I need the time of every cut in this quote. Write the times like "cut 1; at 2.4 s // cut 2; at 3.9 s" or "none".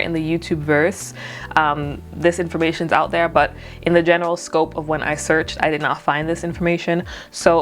none